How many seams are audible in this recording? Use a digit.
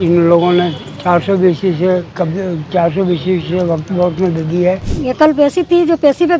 1